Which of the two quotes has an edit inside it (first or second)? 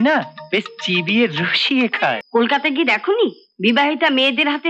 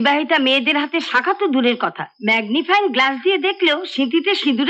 first